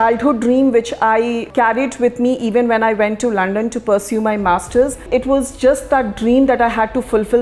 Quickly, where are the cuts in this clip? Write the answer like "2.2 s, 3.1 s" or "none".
1.4 s, 5.0 s

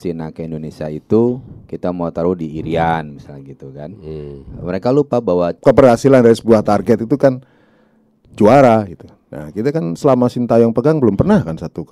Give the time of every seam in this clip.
5.6 s

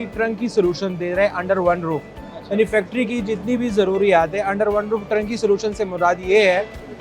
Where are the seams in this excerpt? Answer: none

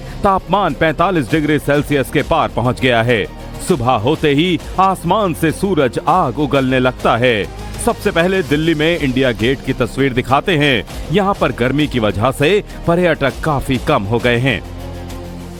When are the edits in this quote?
none

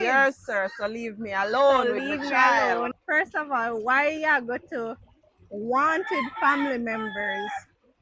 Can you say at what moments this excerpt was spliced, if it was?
3.0 s

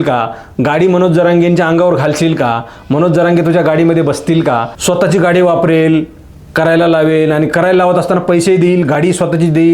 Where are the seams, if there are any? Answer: 4.7 s

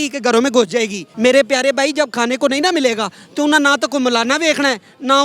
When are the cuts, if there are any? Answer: 1.0 s

